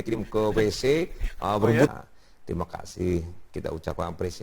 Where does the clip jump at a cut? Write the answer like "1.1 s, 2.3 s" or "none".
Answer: 1.9 s